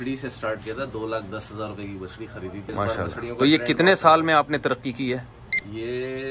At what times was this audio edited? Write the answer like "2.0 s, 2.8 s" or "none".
2.7 s